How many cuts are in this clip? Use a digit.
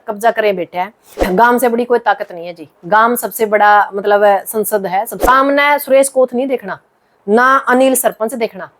2